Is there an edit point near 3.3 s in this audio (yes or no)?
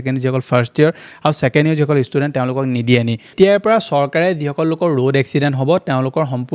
yes